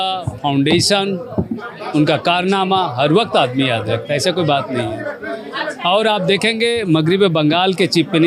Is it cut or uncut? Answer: uncut